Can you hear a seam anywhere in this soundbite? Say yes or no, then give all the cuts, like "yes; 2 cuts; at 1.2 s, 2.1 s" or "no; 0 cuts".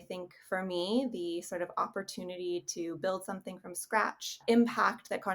yes; 1 cut; at 4.4 s